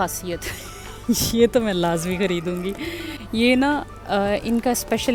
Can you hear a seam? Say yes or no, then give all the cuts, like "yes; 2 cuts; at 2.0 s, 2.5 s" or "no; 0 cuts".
no; 0 cuts